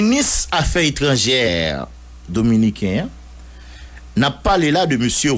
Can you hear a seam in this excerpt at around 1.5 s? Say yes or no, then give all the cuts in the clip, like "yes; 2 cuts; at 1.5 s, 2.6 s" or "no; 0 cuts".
yes; 1 cut; at 1.5 s